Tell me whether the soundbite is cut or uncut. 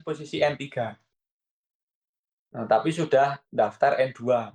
uncut